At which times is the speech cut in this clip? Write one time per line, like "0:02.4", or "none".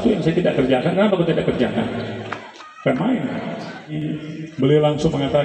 0:03.9